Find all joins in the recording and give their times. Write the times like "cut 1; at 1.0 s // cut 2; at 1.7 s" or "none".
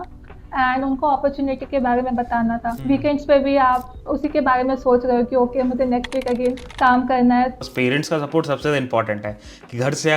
cut 1; at 2.7 s // cut 2; at 3.9 s // cut 3; at 6.7 s // cut 4; at 7.6 s